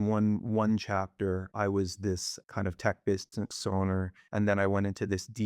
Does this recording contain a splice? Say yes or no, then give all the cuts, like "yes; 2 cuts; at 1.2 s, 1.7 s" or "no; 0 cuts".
yes; 2 cuts; at 1.5 s, 2.3 s